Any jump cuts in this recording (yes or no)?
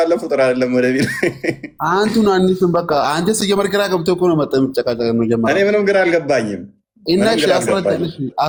no